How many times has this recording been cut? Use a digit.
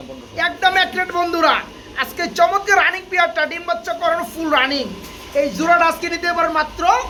0